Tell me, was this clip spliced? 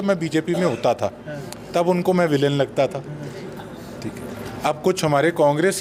no; 0 cuts

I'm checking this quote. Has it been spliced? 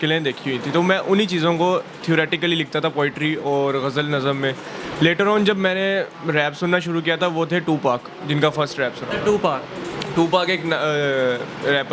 no; 0 cuts

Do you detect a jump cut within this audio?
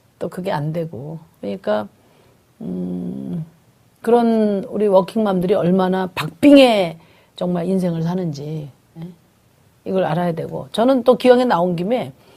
no; 0 cuts

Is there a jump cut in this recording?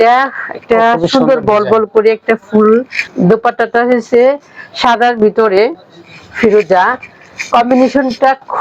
yes; 1 cut; at 3.0 s

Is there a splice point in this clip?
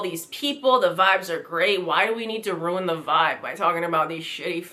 no; 0 cuts

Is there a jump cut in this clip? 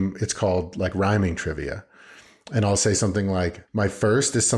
yes; 1 cut; at 3.6 s

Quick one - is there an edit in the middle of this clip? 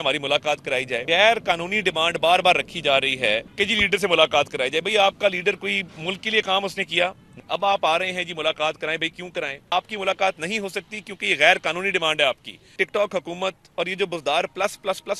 yes; 5 cuts; at 1.0 s, 3.5 s, 7.3 s, 9.6 s, 12.6 s

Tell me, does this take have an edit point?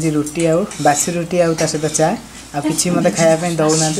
no; 0 cuts

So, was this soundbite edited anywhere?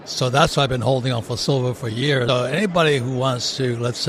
yes; 1 cut; at 2.3 s

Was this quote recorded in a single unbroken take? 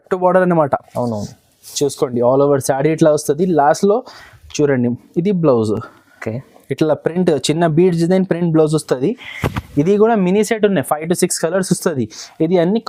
yes; 0 cuts

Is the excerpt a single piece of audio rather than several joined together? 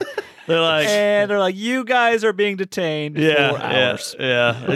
yes; 0 cuts

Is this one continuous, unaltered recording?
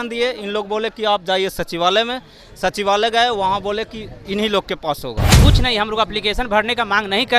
no; 1 cut; at 5.4 s

